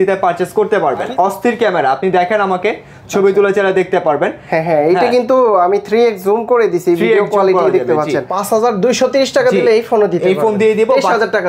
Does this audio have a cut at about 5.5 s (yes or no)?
no